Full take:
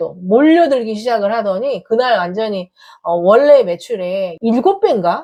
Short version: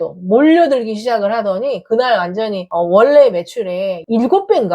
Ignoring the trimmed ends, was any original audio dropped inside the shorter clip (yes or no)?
yes